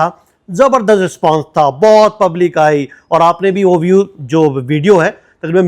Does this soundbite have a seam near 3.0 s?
no; 0 cuts

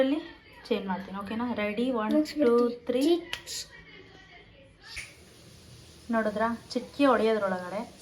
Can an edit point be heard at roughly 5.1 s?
yes; 1 cut; at 5.1 s

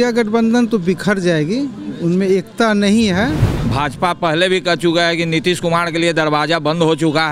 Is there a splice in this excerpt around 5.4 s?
no; 1 cut; at 3.5 s

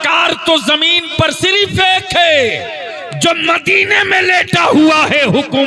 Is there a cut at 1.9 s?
no; 0 cuts

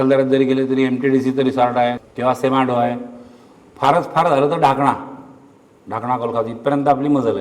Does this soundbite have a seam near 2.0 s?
yes; 1 cut; at 2.0 s

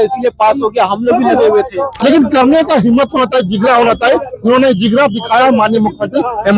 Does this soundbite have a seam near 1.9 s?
yes; 1 cut; at 1.9 s

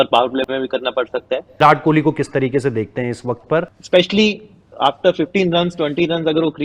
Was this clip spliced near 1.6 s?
yes; 2 cuts; at 1.6 s, 3.8 s

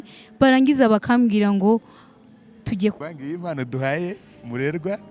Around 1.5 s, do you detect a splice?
no; 1 cut; at 3.0 s

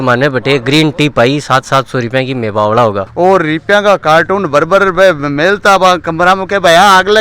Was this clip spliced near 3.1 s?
yes; 1 cut; at 3.1 s

